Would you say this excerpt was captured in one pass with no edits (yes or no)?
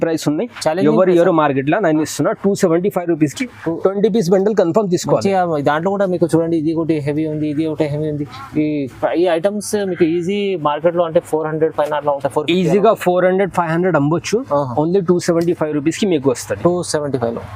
yes